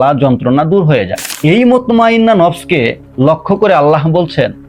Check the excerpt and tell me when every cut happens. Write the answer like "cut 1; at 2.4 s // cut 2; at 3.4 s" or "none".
cut 1; at 1.2 s

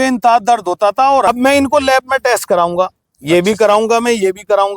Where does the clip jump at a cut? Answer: cut 1; at 1.3 s

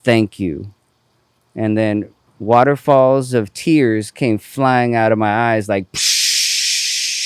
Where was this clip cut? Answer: cut 1; at 2.2 s

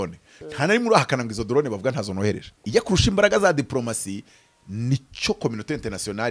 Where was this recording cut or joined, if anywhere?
cut 1; at 2.5 s

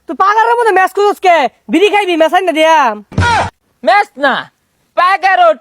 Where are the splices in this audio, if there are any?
cut 1; at 3.3 s

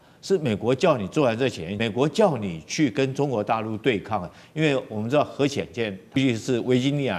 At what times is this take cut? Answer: cut 1; at 1.7 s // cut 2; at 6.2 s

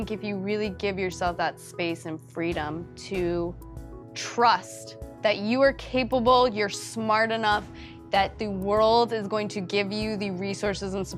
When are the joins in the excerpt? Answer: none

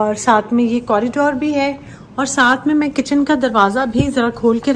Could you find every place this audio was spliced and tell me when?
none

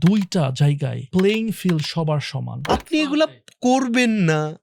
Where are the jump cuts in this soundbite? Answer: cut 1; at 0.9 s // cut 2; at 2.7 s

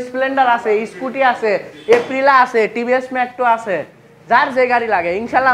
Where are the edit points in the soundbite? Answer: none

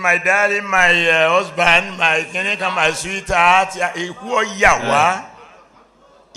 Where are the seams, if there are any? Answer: none

